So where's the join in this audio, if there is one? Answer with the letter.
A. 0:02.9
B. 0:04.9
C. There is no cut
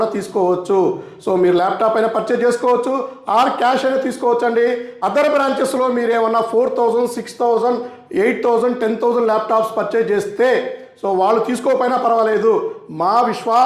B